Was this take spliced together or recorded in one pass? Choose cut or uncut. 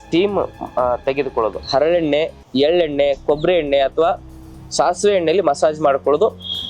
cut